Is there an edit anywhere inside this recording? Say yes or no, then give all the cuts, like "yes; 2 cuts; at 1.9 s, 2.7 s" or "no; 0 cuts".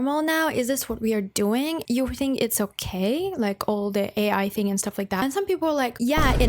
yes; 1 cut; at 1.8 s